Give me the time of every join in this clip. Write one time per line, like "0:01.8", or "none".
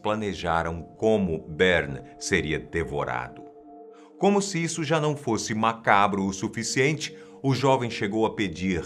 none